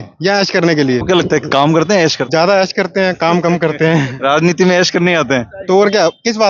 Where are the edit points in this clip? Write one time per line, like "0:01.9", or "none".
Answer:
0:01.0
0:02.2